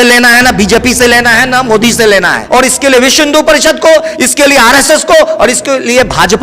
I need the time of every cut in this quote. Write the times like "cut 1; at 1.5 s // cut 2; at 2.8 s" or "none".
cut 1; at 2.4 s